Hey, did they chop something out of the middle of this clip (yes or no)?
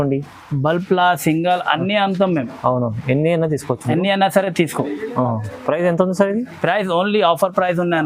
no